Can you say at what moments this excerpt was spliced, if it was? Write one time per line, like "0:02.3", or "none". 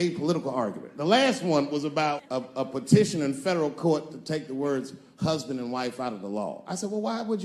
0:02.4